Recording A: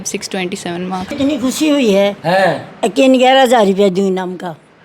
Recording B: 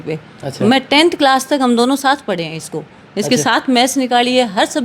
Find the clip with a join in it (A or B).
A